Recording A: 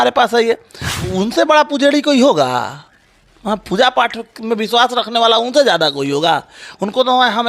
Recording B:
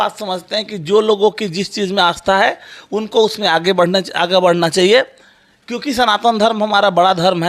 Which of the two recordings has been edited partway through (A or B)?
A